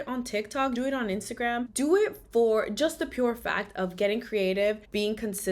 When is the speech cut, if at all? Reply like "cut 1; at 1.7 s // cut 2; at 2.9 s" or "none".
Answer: none